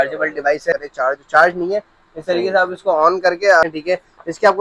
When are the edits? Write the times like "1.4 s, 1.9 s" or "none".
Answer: 0.7 s, 3.6 s